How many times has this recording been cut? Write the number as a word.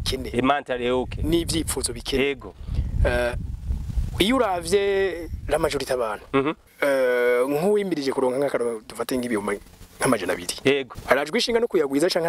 two